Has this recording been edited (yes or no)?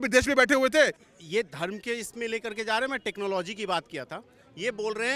no